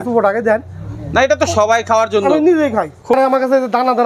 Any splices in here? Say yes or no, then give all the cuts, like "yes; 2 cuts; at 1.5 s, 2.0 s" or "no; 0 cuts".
yes; 1 cut; at 3.1 s